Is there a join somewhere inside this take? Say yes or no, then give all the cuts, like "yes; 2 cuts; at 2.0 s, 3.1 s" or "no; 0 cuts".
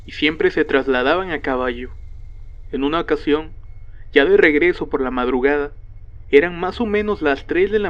no; 0 cuts